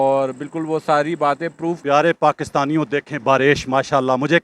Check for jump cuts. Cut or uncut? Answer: cut